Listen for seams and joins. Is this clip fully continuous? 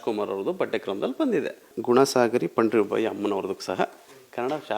no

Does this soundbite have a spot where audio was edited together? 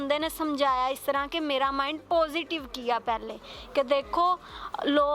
no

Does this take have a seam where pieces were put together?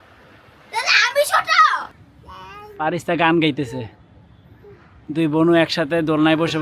yes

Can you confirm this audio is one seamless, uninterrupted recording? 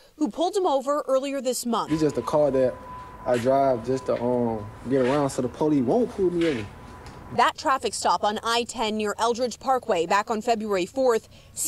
yes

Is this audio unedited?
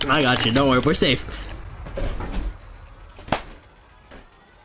yes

